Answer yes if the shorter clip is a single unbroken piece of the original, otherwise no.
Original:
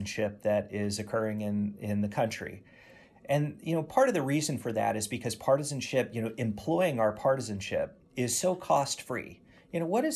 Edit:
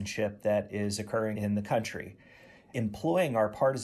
no